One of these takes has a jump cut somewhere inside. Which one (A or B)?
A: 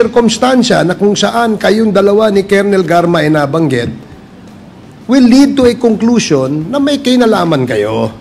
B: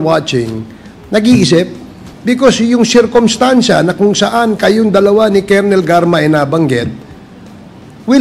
B